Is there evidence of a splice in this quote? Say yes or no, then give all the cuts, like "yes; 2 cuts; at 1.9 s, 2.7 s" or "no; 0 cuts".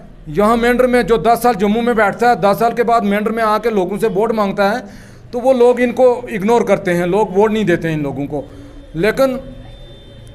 no; 0 cuts